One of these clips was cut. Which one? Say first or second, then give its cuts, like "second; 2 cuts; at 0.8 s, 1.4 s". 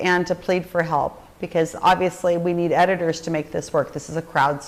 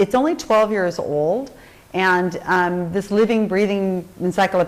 second; 1 cut; at 2.8 s